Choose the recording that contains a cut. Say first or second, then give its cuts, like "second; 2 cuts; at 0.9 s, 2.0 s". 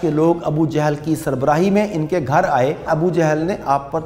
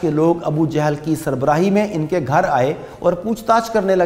first; 1 cut; at 2.9 s